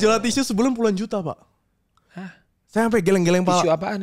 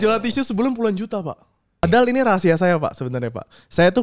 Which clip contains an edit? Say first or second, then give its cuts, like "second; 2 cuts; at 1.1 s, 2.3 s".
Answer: second; 1 cut; at 1.8 s